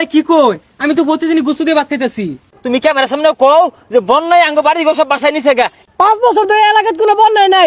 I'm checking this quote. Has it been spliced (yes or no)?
yes